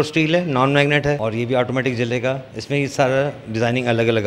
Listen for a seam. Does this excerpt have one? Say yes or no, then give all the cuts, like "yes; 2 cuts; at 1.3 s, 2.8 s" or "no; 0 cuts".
yes; 2 cuts; at 1.2 s, 2.5 s